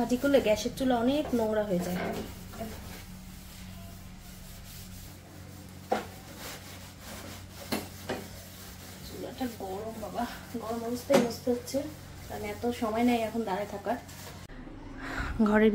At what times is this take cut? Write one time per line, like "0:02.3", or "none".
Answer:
0:05.2
0:14.7